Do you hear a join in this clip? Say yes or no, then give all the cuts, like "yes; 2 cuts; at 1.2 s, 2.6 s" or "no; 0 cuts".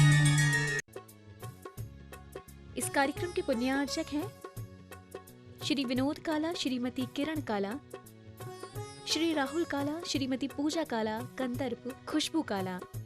yes; 1 cut; at 0.9 s